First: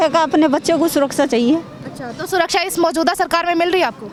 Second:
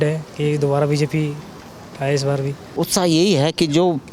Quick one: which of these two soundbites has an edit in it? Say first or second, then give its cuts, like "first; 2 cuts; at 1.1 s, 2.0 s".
second; 1 cut; at 2.7 s